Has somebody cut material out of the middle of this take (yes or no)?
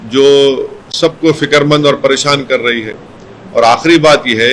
no